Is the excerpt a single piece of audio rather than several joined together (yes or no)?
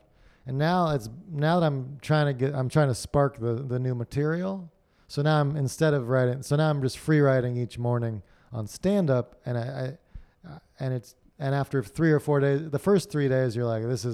yes